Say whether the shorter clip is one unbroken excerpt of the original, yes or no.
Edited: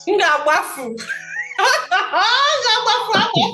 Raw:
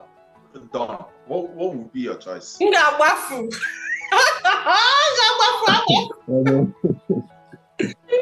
yes